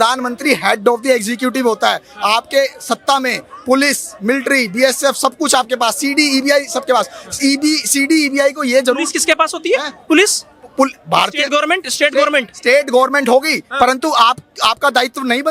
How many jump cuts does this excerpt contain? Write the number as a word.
zero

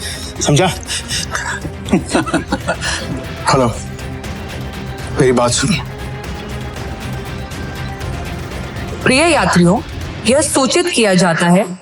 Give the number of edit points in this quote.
two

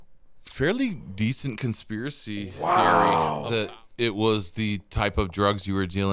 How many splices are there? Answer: one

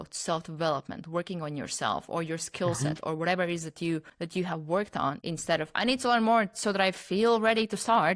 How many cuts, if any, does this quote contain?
two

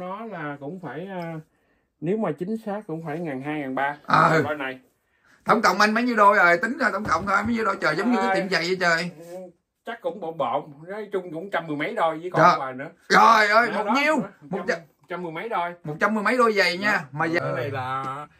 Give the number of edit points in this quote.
one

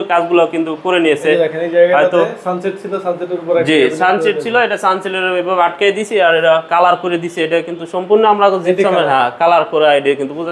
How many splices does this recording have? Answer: zero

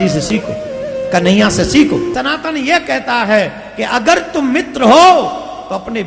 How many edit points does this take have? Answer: one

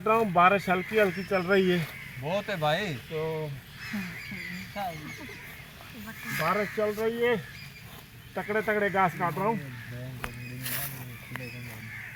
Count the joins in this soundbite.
zero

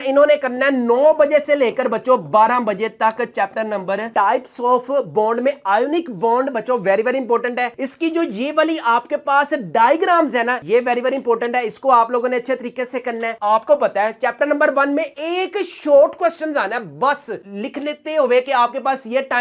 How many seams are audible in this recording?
three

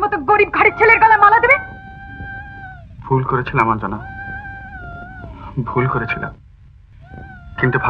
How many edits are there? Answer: zero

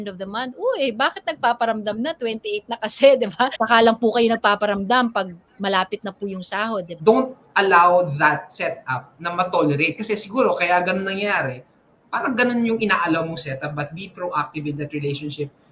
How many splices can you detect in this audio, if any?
two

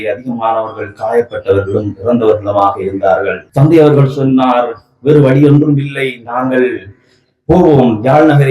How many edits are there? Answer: one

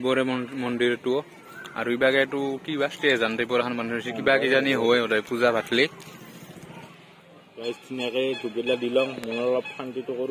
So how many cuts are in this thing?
one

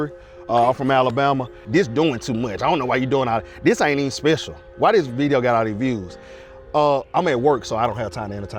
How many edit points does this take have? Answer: one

